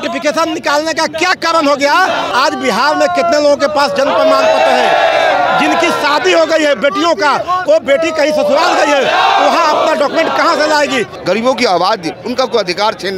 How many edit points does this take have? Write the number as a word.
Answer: two